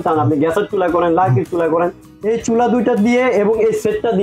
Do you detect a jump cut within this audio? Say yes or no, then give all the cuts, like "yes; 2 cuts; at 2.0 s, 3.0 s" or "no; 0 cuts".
yes; 1 cut; at 2.1 s